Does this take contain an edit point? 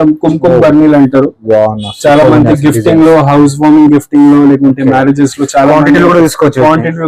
no; 0 cuts

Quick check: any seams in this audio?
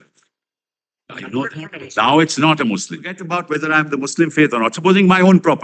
yes; 1 cut; at 3.2 s

